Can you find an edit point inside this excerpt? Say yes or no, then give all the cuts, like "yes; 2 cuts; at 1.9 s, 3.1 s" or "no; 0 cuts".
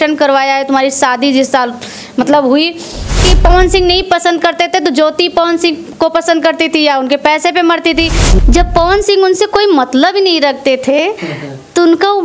yes; 2 cuts; at 3.2 s, 8.2 s